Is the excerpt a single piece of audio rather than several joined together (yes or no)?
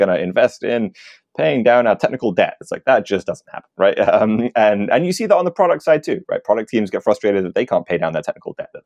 yes